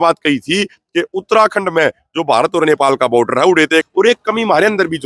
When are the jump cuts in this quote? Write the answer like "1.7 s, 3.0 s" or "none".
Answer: 3.9 s